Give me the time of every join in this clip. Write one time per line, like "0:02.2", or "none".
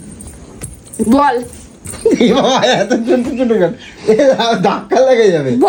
none